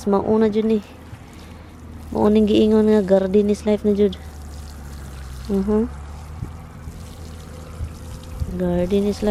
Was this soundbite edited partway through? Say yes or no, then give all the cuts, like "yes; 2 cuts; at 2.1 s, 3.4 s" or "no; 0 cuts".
no; 0 cuts